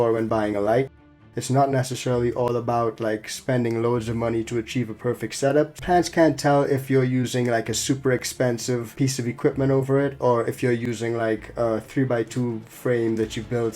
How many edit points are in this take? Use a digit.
3